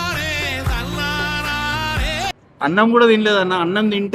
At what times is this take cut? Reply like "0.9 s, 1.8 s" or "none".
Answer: 2.4 s